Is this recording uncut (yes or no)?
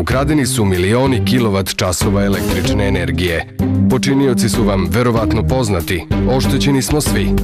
yes